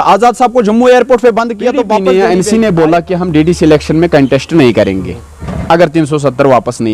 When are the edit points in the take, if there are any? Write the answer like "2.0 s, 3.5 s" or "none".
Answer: 2.0 s